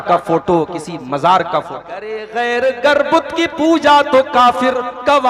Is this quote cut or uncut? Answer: cut